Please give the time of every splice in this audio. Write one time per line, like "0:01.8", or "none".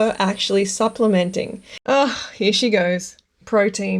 0:01.8